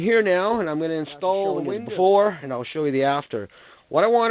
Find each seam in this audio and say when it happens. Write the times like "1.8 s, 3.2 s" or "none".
1.7 s